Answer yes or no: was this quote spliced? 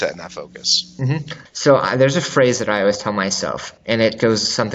yes